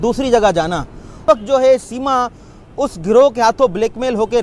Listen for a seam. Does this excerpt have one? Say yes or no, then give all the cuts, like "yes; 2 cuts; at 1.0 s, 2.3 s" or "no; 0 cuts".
yes; 1 cut; at 1.0 s